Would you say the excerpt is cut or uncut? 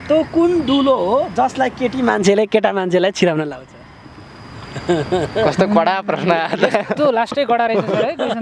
uncut